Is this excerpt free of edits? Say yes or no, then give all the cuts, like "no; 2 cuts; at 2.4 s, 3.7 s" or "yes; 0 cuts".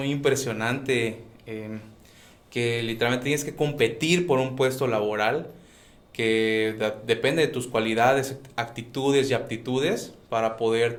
yes; 0 cuts